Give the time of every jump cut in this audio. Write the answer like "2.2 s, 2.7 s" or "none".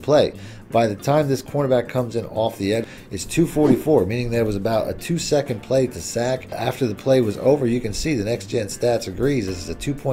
3.2 s, 6.6 s